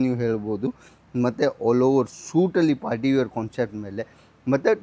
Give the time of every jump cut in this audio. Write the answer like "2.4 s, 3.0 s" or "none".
none